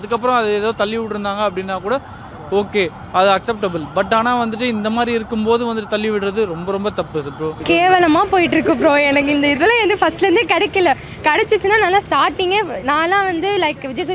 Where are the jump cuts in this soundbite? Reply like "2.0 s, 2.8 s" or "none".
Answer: 7.6 s